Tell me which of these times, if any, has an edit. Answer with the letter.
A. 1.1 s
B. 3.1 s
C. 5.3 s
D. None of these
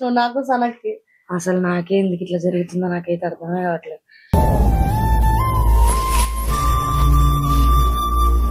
D